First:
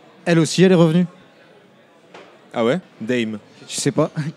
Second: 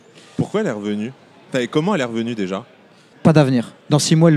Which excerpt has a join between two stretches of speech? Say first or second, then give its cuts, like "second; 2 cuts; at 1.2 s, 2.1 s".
second; 1 cut; at 3.0 s